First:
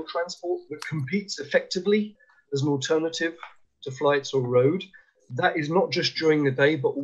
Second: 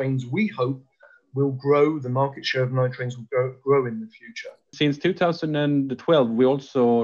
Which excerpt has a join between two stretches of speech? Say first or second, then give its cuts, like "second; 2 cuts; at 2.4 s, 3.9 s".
second; 1 cut; at 4.7 s